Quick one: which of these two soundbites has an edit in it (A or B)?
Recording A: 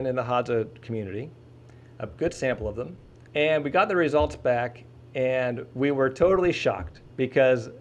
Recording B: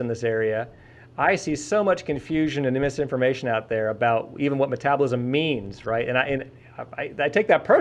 A